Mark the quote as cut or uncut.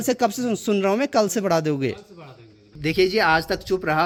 uncut